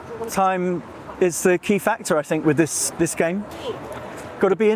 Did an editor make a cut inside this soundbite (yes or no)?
no